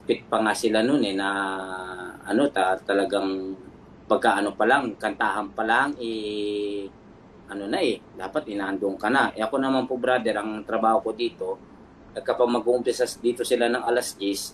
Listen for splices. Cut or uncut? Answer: uncut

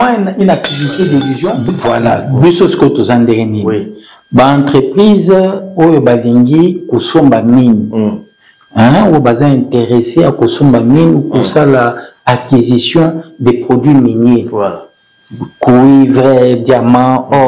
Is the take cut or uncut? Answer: cut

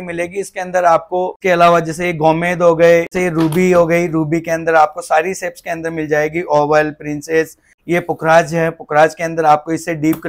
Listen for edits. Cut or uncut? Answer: cut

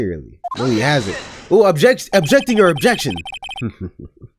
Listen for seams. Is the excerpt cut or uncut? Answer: uncut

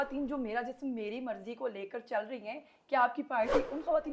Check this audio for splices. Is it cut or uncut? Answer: uncut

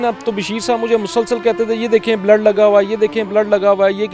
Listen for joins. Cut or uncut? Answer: uncut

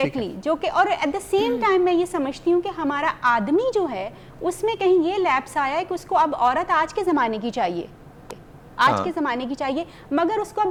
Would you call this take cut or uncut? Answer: uncut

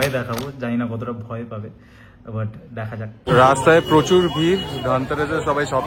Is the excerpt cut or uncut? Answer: cut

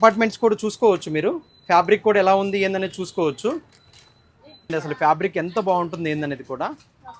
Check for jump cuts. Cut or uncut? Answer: cut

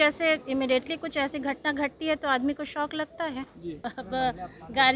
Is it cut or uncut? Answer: cut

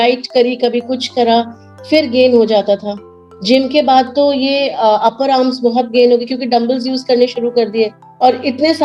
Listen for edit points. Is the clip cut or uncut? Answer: uncut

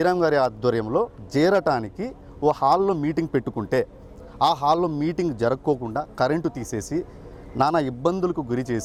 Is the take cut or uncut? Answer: uncut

